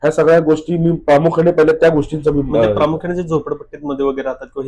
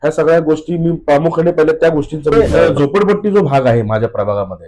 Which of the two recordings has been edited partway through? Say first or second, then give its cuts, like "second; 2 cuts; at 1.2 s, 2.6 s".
second; 1 cut; at 2.3 s